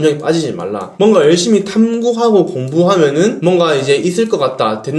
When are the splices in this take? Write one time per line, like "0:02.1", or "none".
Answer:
none